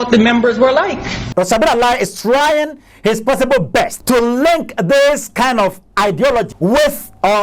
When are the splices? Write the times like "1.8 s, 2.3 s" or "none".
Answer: 1.1 s, 4.0 s, 6.5 s